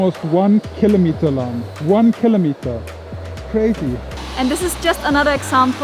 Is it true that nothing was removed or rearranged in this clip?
no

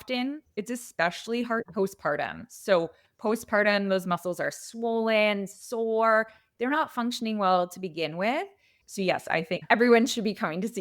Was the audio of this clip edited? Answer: yes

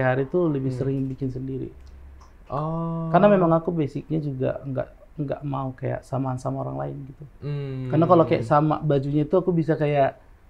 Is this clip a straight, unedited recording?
yes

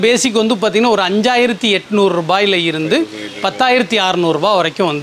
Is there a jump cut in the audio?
no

